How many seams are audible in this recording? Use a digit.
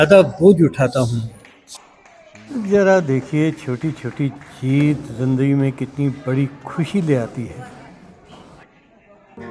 0